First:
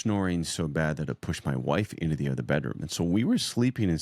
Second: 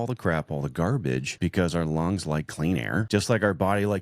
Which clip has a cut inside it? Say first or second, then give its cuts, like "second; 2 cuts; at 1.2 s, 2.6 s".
second; 2 cuts; at 1.3 s, 3.1 s